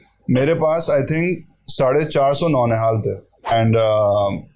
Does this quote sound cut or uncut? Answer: cut